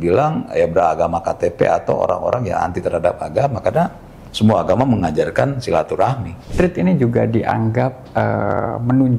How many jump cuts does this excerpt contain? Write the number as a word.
one